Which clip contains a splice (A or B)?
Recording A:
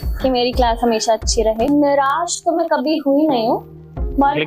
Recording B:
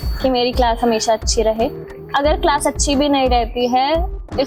A